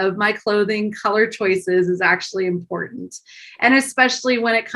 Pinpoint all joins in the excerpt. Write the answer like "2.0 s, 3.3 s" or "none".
none